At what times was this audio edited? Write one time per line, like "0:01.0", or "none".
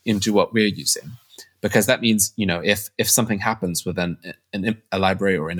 none